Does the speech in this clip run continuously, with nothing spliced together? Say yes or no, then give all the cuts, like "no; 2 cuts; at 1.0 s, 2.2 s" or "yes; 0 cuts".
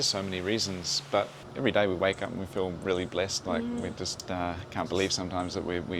no; 2 cuts; at 1.4 s, 4.2 s